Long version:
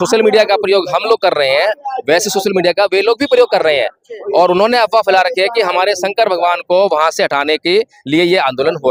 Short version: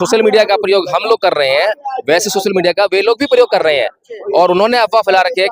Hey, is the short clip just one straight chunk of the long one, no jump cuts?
yes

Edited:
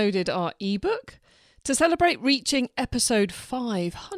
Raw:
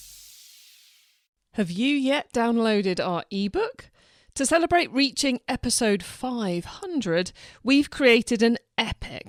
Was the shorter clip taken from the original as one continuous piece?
yes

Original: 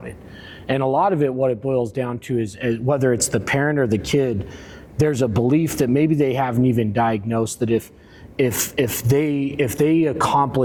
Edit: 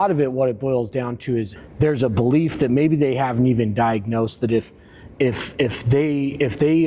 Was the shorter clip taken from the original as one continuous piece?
no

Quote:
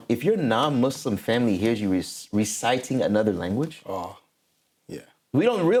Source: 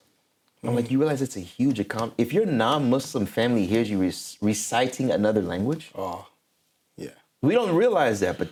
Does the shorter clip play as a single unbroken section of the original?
yes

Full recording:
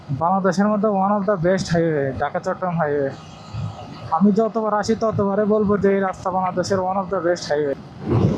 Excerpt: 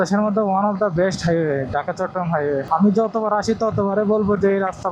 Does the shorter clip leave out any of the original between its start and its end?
yes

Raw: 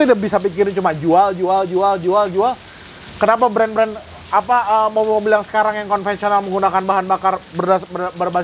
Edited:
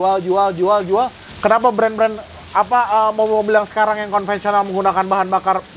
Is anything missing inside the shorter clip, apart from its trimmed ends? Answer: yes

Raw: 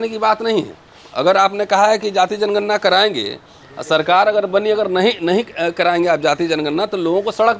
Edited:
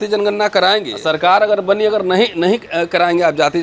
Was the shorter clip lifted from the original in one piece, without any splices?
no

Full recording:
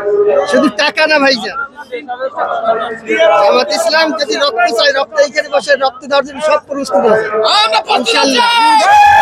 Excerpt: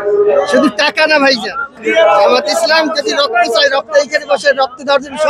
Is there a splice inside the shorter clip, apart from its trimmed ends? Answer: yes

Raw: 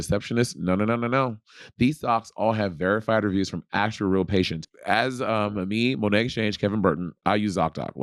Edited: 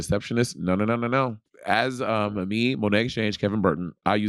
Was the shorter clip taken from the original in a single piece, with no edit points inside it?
no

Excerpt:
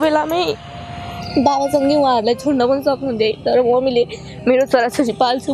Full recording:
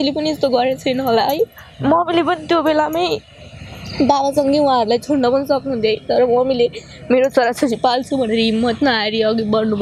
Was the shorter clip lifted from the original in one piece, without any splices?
yes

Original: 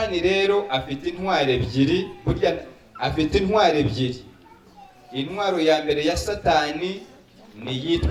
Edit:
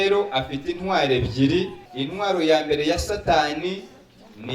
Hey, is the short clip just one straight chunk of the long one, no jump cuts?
no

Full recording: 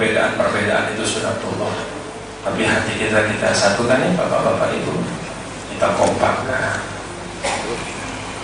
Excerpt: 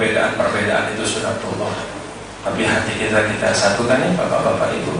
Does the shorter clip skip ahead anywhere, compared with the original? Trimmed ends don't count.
no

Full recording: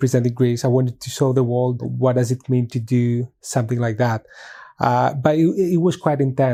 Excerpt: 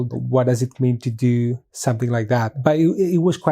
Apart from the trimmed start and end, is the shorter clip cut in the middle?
yes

